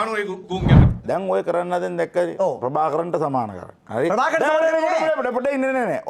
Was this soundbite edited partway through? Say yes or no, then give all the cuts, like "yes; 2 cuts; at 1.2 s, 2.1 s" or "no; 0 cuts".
yes; 1 cut; at 1.0 s